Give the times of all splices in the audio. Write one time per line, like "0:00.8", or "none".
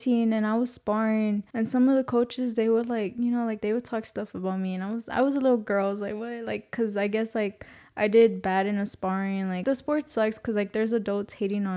0:01.5
0:09.6

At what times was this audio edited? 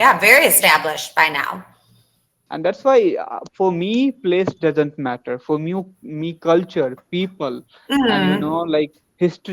0:02.4

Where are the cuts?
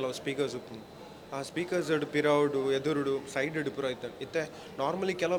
none

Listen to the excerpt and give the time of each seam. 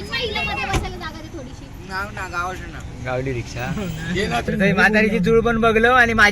0:04.5

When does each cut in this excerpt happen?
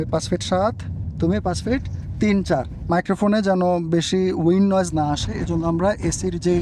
none

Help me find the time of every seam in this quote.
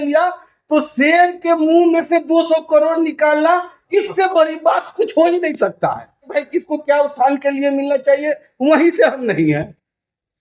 0:06.3

